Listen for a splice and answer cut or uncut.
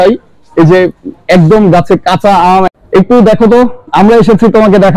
cut